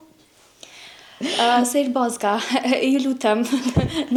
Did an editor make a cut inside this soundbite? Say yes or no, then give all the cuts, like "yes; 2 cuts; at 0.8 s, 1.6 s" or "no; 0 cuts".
no; 0 cuts